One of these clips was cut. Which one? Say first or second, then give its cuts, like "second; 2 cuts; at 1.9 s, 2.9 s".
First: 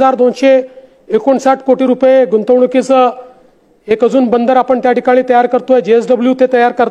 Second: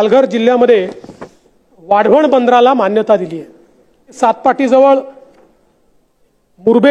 second; 1 cut; at 4.2 s